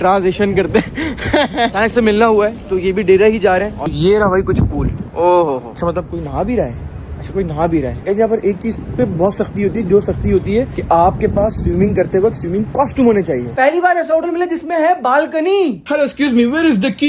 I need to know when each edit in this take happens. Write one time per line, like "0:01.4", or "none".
0:03.8
0:13.5